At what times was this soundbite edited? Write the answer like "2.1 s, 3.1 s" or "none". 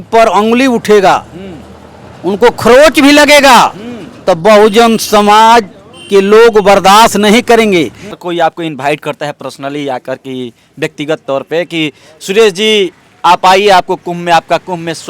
8.2 s